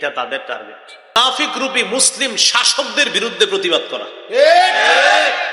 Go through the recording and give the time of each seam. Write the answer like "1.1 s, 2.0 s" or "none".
1.2 s